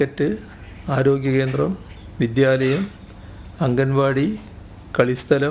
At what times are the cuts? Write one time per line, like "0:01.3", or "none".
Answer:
none